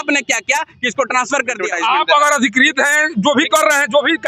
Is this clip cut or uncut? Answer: cut